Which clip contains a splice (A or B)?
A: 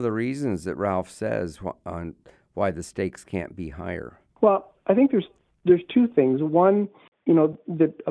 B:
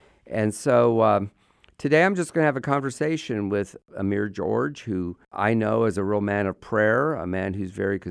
B